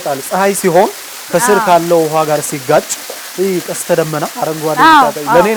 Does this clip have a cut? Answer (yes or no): no